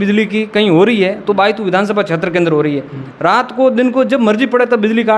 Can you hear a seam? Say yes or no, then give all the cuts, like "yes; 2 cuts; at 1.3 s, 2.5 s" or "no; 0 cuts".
no; 0 cuts